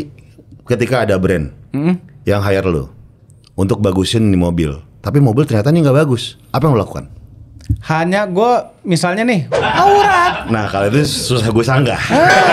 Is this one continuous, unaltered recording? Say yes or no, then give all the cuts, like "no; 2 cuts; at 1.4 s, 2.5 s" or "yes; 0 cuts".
no; 1 cut; at 9.5 s